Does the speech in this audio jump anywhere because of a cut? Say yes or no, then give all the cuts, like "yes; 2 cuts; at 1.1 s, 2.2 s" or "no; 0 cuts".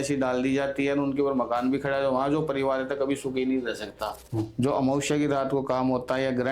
yes; 1 cut; at 4.1 s